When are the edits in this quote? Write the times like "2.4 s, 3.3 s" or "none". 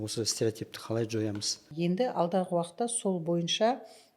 1.7 s